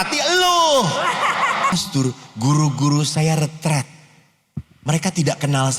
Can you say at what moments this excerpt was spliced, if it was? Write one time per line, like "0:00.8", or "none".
0:01.7